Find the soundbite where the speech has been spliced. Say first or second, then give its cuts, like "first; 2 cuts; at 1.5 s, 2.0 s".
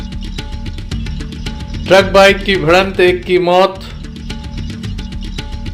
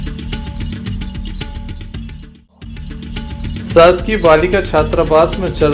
first; 1 cut; at 1.3 s